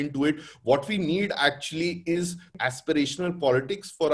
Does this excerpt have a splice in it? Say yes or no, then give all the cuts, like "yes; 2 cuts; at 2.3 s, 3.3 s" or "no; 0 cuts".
yes; 1 cut; at 2.5 s